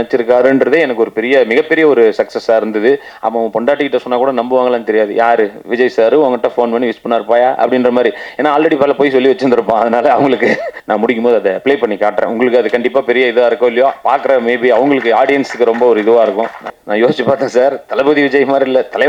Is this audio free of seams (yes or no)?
no